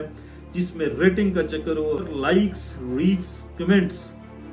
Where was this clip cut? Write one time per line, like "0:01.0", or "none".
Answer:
0:02.0